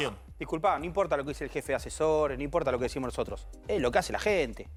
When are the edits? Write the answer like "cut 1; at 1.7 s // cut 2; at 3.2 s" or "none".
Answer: none